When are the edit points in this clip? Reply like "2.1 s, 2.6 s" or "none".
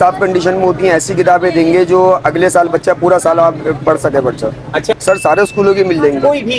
5.0 s